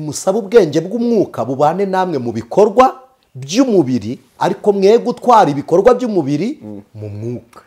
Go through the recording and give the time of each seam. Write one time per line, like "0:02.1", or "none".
none